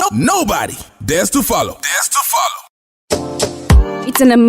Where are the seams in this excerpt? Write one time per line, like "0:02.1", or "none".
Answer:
0:02.5